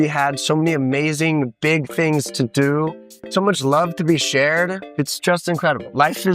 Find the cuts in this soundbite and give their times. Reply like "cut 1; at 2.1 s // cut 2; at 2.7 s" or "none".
cut 1; at 3.2 s // cut 2; at 4.8 s